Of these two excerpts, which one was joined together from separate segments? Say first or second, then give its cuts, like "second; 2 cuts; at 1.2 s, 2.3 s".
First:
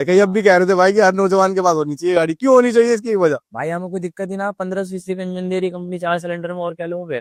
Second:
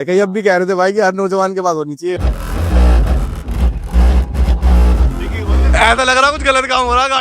second; 1 cut; at 2.1 s